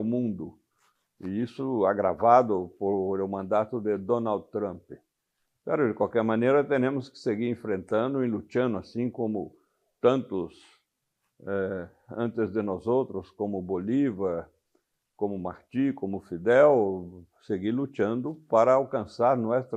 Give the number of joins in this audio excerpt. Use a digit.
0